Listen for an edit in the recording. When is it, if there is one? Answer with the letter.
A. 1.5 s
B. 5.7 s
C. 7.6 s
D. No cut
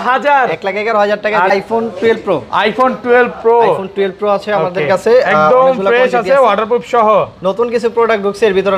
A